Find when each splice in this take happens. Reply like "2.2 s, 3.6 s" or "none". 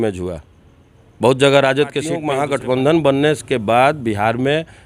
2.2 s

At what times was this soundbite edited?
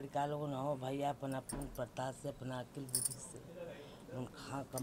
none

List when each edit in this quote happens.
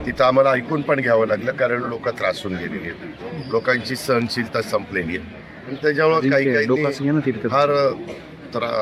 none

